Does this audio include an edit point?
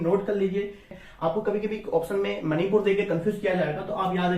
yes; 1 cut; at 1.0 s

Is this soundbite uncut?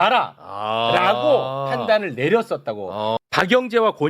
no; 1 cut; at 3.1 s

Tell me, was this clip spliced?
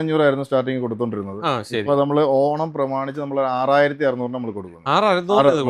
no; 0 cuts

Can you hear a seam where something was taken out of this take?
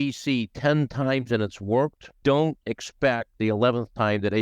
yes; 2 cuts; at 2.1 s, 3.3 s

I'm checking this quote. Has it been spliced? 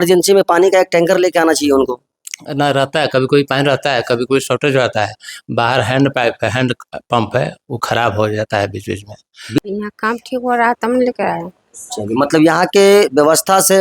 yes; 1 cut; at 9.6 s

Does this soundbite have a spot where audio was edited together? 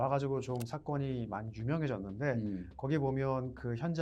no; 0 cuts

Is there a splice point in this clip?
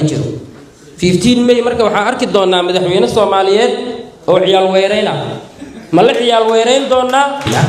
no; 0 cuts

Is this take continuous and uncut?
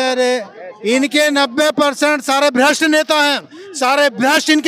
yes; 0 cuts

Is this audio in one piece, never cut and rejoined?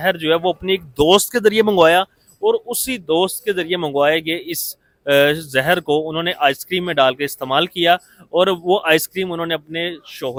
yes; 0 cuts

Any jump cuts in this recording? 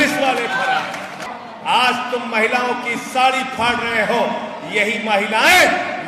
yes; 1 cut; at 1.3 s

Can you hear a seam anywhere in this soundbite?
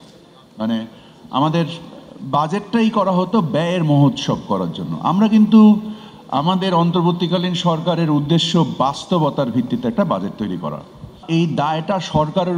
yes; 1 cut; at 11.2 s

